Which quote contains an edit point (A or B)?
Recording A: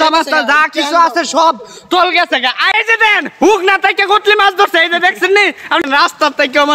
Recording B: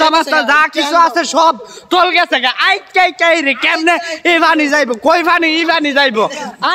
A